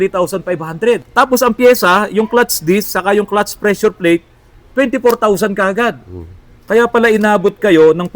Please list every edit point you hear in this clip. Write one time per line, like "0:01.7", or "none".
0:01.1

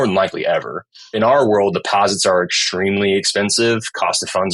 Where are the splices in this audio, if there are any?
0:01.1

